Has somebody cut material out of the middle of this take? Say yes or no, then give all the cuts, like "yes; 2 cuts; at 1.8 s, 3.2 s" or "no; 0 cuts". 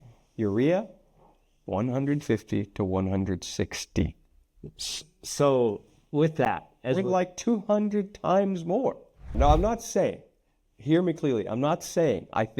yes; 1 cut; at 9.4 s